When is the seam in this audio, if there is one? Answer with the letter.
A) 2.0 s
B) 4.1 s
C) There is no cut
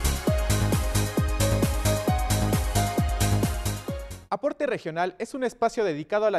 B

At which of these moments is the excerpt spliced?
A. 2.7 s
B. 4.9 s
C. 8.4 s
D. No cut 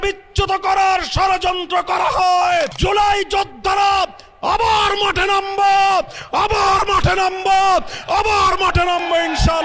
A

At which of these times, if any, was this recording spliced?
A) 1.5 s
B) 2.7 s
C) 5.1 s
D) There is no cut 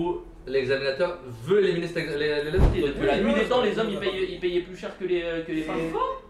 B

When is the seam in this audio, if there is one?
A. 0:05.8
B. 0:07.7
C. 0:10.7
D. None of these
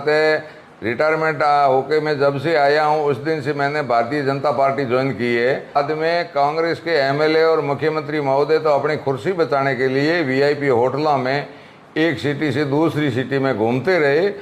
A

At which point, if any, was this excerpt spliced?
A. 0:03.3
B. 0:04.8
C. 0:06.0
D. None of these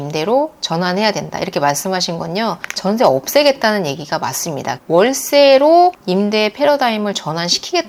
B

